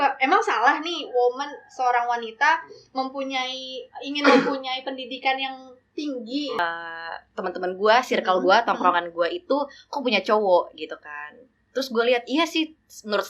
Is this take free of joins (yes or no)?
no